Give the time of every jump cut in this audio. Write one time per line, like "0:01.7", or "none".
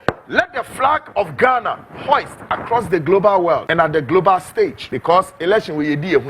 0:03.7
0:04.9